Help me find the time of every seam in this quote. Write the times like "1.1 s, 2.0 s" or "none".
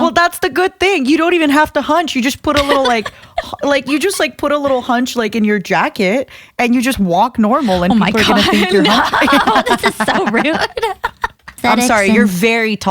11.5 s